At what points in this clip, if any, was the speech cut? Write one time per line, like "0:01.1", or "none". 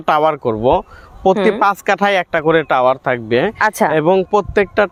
none